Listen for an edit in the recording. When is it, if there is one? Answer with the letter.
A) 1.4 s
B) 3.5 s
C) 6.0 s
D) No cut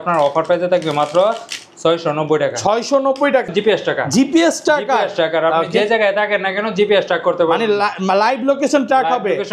B